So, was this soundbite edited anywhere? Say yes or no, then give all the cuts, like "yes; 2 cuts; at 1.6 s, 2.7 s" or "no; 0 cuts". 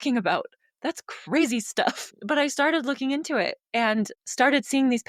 yes; 2 cuts; at 2.2 s, 4.2 s